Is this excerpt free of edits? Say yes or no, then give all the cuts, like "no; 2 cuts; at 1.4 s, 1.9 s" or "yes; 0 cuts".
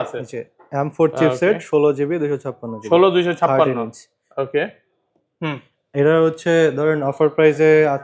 yes; 0 cuts